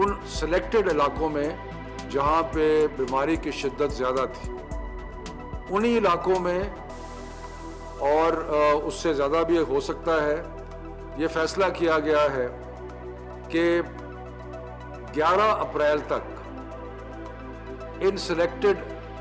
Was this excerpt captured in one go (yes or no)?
no